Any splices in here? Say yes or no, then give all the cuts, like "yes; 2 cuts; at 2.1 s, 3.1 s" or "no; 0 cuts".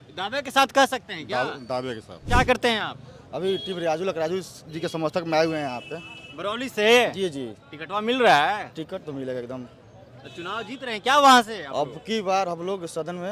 yes; 1 cut; at 2.2 s